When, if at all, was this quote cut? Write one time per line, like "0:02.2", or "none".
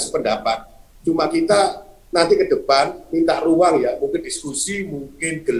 none